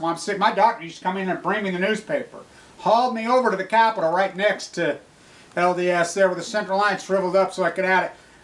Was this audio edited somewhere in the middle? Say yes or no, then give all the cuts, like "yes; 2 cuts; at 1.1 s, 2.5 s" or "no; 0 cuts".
no; 0 cuts